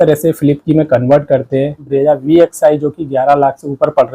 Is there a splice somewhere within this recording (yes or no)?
yes